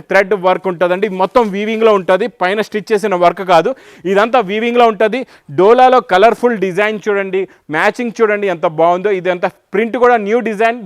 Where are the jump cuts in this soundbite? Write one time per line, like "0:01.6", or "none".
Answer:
none